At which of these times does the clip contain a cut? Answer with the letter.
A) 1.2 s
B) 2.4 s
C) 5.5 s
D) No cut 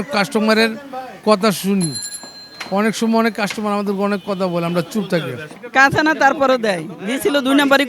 C